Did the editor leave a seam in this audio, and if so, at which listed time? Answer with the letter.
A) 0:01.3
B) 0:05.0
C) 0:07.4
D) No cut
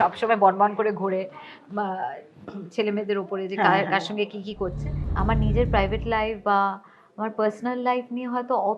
B